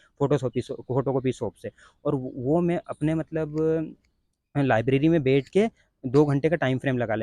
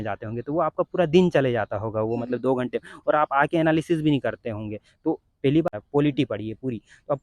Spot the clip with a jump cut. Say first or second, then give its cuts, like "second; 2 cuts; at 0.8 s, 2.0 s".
second; 1 cut; at 5.8 s